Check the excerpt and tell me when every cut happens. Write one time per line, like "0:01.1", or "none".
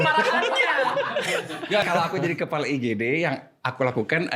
0:01.9